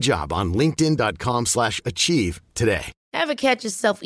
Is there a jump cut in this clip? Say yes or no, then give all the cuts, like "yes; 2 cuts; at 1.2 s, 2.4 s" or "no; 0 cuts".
yes; 1 cut; at 2.9 s